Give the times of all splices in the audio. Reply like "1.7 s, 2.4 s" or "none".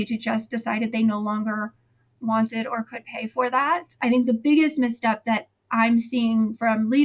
3.9 s